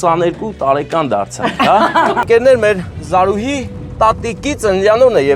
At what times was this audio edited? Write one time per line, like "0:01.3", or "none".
0:02.2